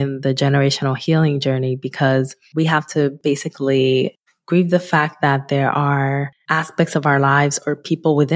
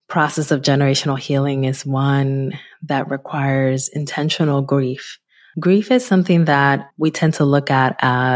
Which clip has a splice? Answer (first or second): first